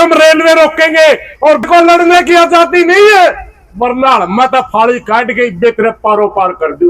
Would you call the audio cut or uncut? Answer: cut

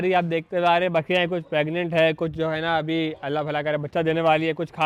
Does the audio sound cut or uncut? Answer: uncut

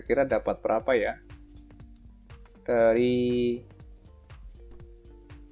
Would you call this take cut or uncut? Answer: uncut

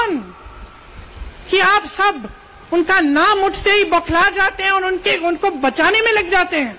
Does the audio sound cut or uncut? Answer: uncut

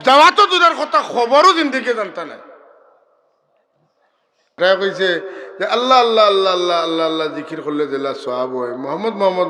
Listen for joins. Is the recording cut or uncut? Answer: cut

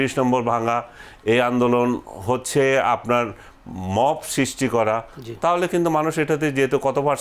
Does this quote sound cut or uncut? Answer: uncut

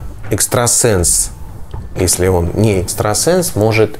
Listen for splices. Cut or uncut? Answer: uncut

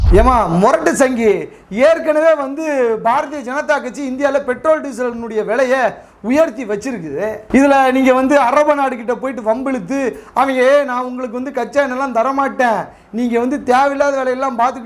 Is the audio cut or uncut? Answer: uncut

